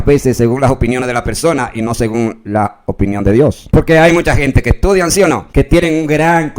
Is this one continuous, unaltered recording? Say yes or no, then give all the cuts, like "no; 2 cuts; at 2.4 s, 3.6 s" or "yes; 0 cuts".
no; 2 cuts; at 3.6 s, 5.4 s